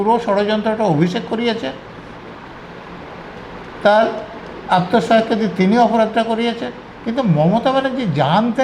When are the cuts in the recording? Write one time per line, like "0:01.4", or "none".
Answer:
none